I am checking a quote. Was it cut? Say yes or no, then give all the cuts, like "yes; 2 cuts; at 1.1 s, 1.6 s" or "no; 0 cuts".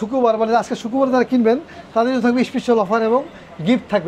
no; 0 cuts